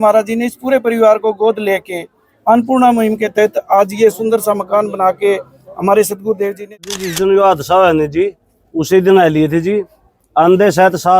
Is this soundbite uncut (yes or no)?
no